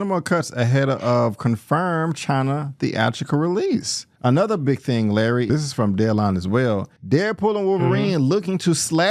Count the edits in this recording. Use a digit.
1